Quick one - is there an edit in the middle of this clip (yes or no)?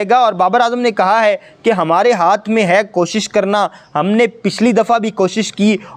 no